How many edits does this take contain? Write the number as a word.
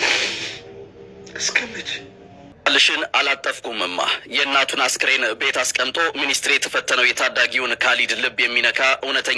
one